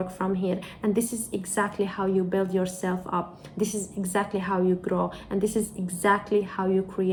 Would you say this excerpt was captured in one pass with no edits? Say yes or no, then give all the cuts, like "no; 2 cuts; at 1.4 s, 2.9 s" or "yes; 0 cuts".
yes; 0 cuts